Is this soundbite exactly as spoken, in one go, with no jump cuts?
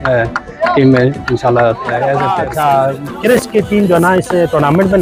no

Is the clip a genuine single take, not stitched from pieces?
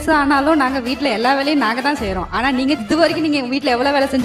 yes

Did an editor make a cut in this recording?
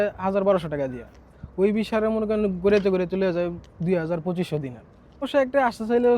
yes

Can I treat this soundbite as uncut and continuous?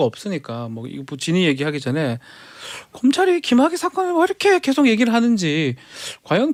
yes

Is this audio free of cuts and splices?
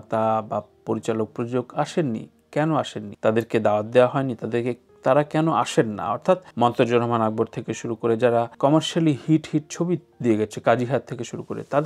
no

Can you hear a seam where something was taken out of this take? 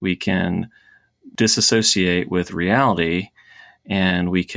yes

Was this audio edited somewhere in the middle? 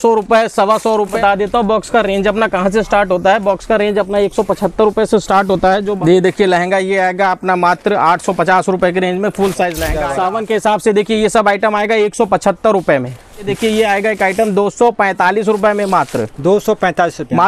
yes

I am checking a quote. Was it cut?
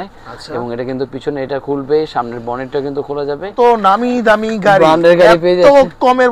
yes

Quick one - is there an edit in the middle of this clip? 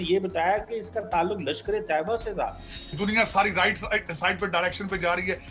yes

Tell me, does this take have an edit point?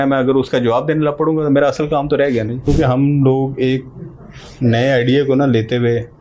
yes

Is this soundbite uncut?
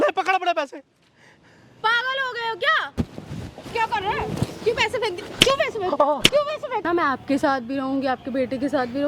no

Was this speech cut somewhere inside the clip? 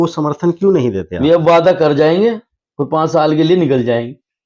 no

